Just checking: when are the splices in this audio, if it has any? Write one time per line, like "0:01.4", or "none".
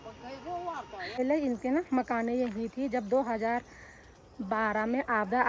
0:01.2